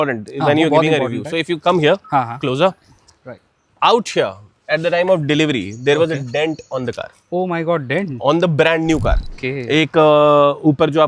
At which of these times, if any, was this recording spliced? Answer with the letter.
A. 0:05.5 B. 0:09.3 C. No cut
B